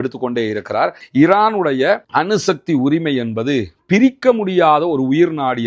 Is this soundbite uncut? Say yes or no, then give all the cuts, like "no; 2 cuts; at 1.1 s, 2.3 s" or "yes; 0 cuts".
no; 1 cut; at 1.0 s